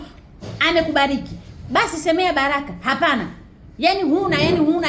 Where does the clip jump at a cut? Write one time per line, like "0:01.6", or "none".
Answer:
none